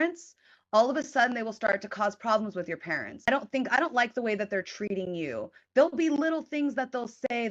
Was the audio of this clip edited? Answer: yes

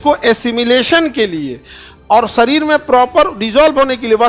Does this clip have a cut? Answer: no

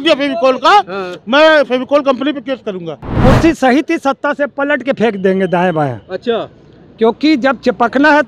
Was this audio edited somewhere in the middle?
yes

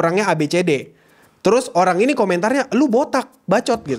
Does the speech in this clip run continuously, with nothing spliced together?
yes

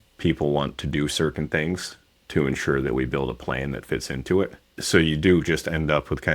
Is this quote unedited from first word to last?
yes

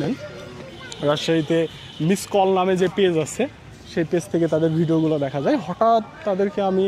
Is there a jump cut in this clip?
no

